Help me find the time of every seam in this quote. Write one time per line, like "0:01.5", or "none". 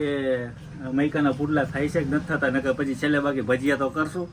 none